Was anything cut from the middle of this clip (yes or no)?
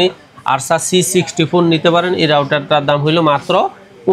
no